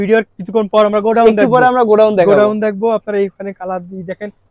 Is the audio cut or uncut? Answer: uncut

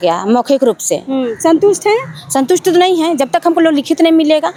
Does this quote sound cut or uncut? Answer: uncut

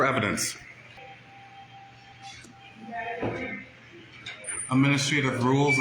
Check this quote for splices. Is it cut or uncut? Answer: cut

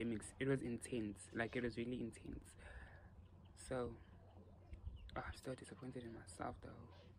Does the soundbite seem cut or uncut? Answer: uncut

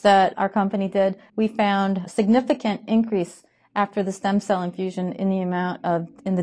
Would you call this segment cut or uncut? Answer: cut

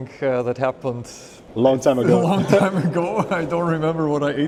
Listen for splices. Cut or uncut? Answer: uncut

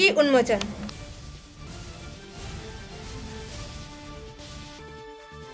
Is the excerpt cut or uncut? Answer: cut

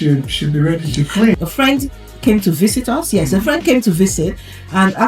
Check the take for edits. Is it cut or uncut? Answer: cut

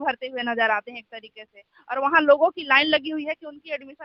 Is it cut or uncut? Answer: uncut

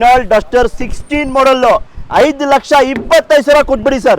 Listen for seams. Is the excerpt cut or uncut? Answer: uncut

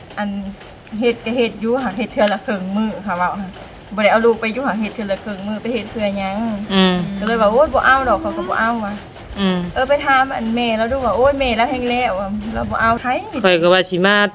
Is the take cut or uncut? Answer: cut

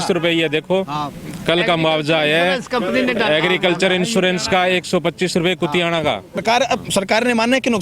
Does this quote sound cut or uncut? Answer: cut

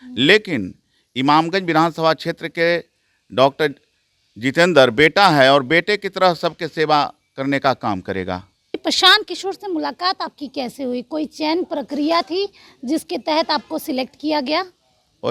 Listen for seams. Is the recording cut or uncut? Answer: cut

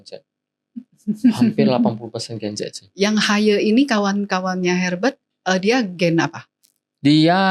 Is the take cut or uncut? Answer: uncut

